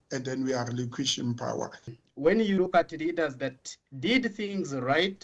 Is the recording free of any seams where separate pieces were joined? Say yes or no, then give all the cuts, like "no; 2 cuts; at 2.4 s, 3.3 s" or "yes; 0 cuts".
no; 1 cut; at 1.9 s